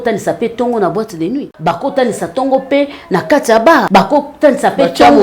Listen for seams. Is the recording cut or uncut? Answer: cut